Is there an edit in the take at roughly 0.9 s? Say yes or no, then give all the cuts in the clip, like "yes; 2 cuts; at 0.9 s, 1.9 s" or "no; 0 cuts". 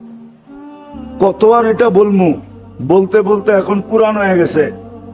yes; 1 cut; at 0.9 s